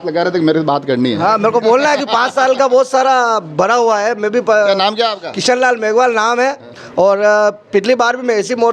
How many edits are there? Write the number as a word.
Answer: zero